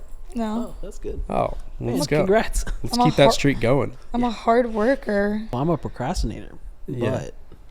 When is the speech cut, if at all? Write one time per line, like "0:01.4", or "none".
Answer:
0:05.5